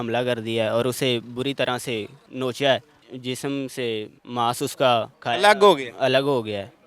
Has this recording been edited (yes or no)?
yes